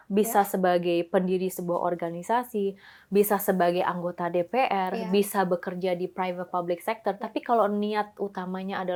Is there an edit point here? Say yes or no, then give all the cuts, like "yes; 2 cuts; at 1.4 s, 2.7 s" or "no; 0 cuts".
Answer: no; 0 cuts